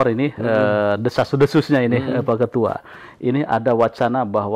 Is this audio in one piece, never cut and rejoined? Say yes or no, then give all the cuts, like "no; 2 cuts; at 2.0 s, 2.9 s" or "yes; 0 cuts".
yes; 0 cuts